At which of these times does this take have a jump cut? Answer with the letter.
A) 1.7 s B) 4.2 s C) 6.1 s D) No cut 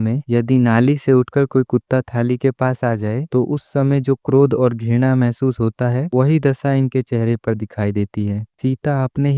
D